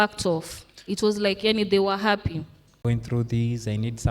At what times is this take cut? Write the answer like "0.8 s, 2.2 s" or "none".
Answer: 2.8 s